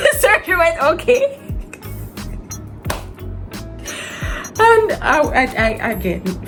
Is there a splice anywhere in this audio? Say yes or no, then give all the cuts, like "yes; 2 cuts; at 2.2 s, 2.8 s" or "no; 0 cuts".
no; 0 cuts